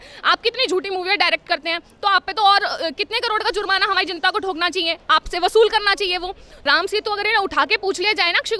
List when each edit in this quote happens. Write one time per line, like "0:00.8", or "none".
0:06.6